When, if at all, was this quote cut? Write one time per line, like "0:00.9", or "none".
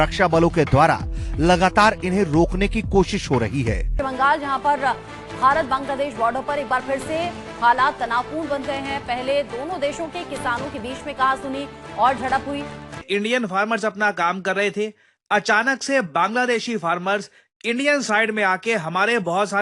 0:03.9
0:13.0